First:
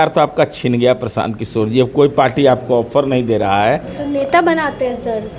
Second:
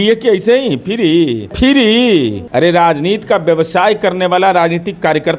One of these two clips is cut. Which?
second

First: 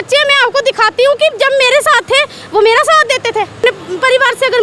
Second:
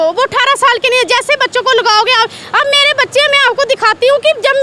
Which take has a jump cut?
first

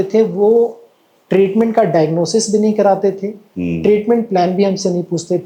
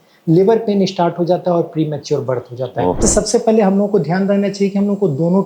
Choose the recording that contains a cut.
second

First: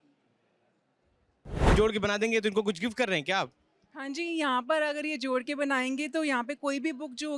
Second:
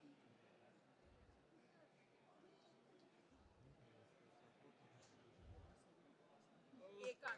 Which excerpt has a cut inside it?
first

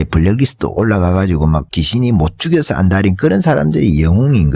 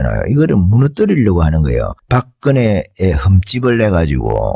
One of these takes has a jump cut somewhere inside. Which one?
first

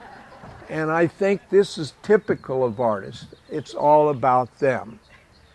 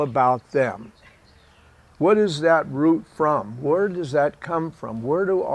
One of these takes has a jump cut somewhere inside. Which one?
second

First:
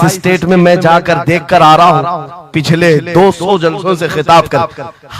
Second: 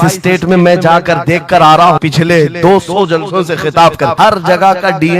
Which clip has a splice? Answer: second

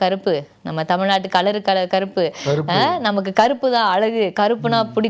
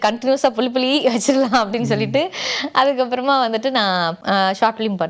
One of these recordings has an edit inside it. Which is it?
second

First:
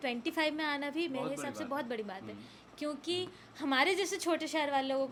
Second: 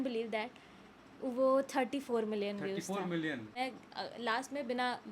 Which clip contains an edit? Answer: second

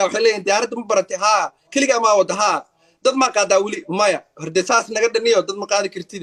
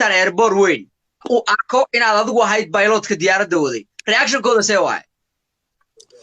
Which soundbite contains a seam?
second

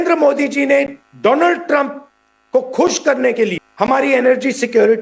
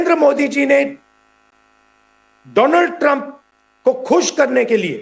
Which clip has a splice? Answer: first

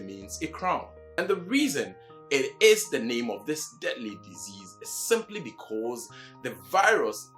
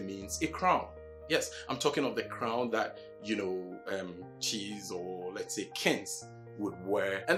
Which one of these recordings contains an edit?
first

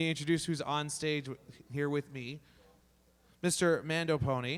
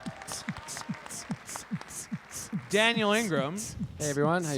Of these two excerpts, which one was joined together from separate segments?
second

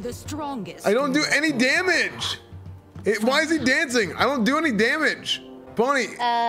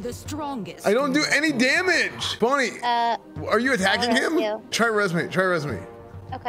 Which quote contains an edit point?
second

